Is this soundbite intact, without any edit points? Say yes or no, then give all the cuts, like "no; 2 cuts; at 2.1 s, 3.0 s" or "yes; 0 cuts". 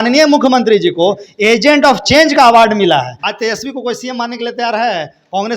no; 1 cut; at 3.2 s